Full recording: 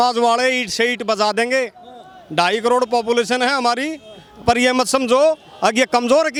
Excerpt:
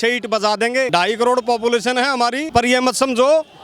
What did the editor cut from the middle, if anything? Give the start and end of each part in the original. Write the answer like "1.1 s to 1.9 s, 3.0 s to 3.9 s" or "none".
1.7 s to 2.3 s, 3.9 s to 4.3 s